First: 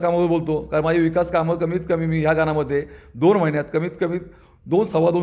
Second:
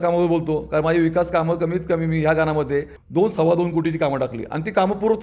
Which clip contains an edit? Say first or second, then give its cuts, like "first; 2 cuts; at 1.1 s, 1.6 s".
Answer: second; 1 cut; at 3.0 s